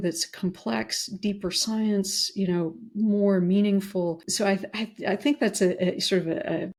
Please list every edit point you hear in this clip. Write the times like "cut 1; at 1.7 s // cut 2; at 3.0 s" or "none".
none